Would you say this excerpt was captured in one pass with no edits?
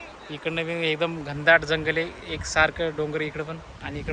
yes; 0 cuts

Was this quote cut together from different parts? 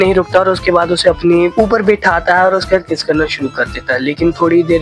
no; 0 cuts

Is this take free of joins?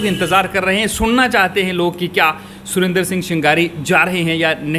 yes; 0 cuts

